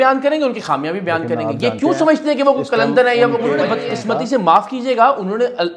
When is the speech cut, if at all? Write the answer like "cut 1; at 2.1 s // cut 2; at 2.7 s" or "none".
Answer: cut 1; at 3.7 s